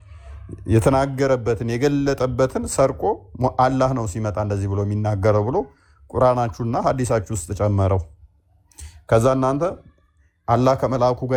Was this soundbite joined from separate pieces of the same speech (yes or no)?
no